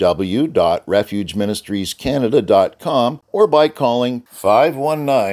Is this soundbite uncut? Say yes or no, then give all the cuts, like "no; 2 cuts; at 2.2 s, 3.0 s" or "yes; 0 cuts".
no; 1 cut; at 3.2 s